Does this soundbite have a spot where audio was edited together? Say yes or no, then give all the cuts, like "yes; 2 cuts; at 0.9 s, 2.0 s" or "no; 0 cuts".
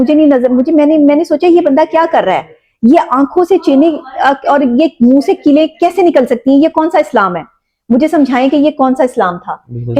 no; 0 cuts